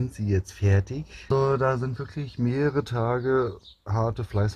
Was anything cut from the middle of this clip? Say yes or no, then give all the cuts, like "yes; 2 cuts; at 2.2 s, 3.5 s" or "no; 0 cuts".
yes; 1 cut; at 1.3 s